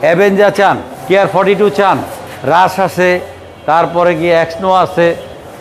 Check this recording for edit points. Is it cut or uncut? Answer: cut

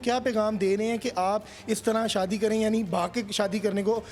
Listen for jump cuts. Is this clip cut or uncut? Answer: uncut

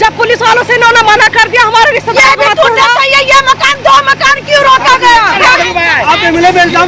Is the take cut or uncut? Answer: uncut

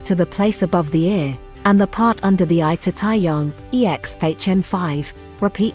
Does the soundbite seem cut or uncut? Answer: uncut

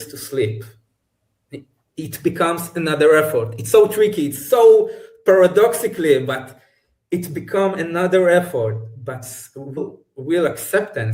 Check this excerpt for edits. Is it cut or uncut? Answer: cut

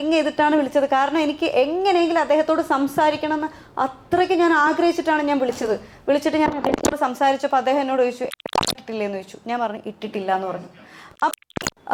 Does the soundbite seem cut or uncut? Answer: uncut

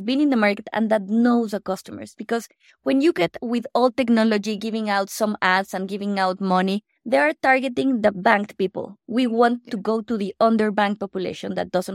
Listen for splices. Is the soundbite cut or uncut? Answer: uncut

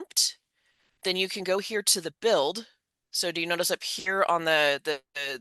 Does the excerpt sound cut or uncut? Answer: uncut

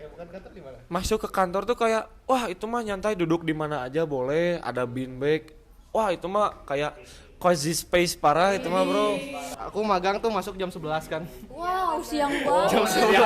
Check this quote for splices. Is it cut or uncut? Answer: cut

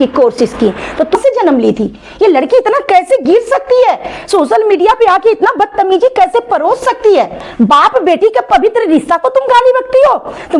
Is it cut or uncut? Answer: cut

